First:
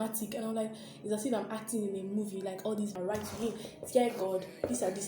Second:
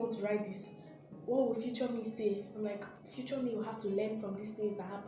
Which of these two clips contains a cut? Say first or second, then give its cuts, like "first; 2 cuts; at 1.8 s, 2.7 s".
first; 1 cut; at 2.9 s